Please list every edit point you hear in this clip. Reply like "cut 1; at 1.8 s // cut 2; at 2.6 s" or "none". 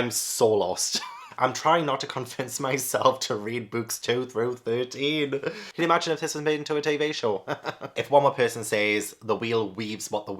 cut 1; at 1.2 s // cut 2; at 5.7 s // cut 3; at 7.9 s